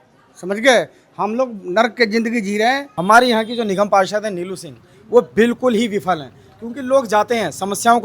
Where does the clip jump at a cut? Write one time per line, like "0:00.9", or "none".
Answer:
0:02.9

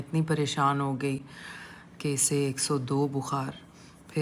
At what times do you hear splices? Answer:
none

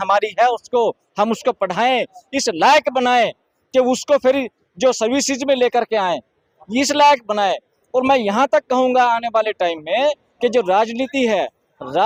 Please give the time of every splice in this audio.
none

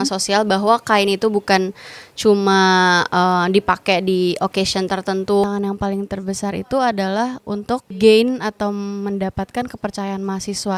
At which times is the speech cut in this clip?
0:05.5
0:07.9

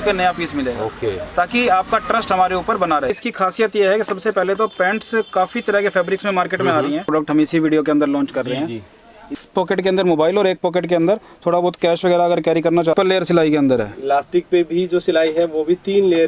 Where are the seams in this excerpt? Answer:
0:03.2
0:07.1
0:09.4
0:12.9

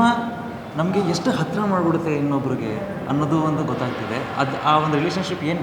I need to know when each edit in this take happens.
none

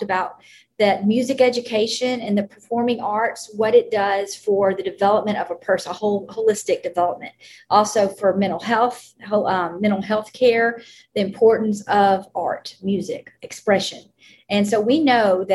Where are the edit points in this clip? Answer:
none

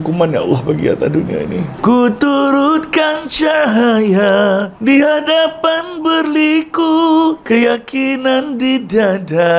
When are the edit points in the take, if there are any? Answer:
0:01.8

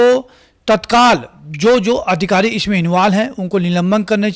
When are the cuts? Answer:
none

